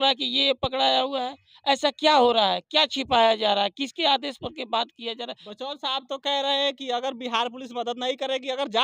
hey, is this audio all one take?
no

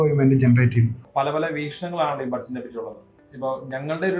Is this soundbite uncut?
no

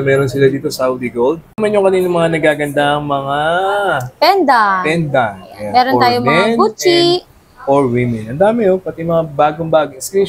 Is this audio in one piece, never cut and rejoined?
no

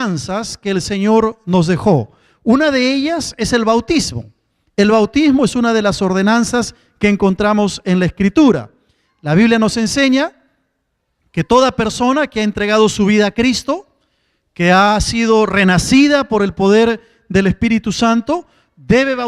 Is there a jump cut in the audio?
yes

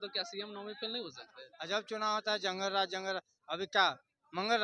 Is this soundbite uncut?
no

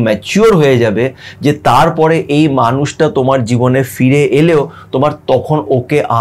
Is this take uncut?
yes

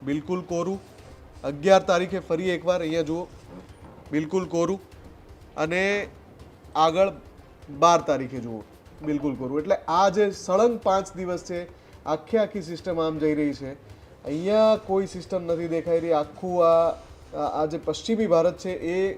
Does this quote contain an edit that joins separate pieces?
no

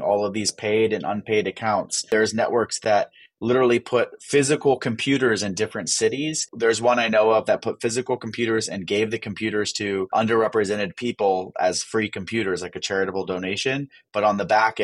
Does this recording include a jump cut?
yes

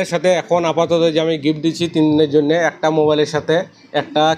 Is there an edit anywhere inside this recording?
no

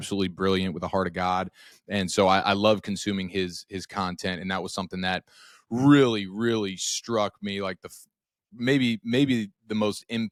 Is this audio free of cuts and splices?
yes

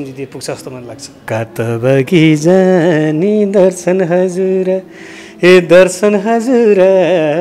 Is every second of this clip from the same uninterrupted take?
no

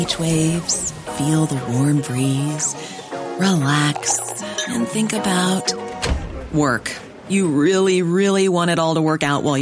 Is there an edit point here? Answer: no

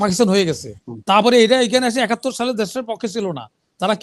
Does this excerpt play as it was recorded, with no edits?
yes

